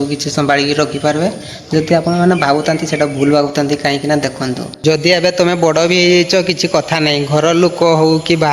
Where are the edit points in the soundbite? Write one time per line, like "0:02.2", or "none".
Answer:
0:04.7